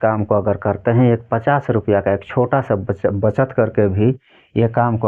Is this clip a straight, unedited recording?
yes; 0 cuts

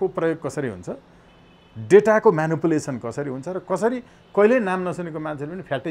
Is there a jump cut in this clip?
no; 0 cuts

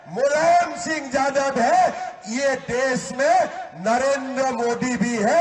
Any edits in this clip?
no; 0 cuts

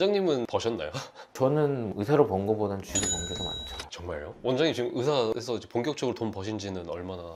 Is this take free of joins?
yes; 0 cuts

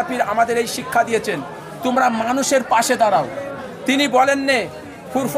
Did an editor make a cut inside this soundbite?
no; 0 cuts

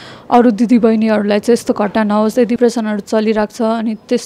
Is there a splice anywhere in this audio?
yes; 1 cut; at 2.6 s

